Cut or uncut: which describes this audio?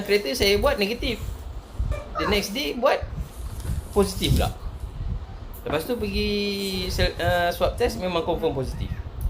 cut